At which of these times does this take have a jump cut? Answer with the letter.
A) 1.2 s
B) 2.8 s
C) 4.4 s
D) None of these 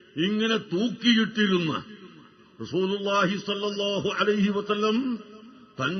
A